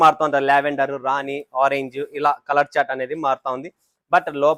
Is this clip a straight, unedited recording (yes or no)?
yes